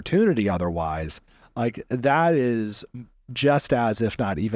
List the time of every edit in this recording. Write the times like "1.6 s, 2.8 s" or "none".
none